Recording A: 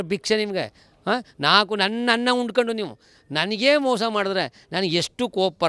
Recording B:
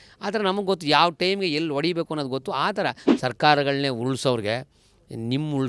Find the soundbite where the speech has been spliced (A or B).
B